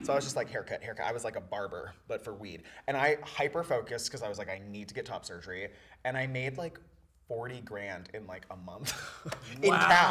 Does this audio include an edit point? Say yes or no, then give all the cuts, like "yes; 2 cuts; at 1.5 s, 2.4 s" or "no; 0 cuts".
no; 0 cuts